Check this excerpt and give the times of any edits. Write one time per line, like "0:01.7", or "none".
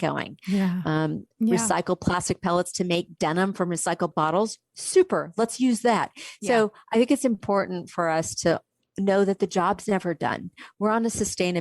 0:01.3